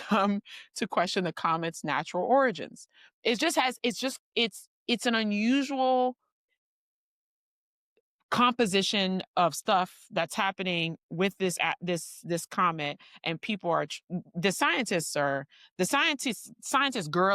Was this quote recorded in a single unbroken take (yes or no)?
yes